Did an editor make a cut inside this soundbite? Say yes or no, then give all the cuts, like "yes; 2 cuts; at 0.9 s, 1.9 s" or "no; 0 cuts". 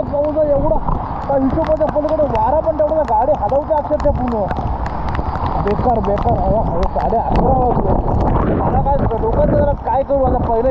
no; 0 cuts